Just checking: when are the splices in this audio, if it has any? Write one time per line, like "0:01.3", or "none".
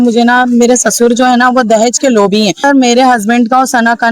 0:02.6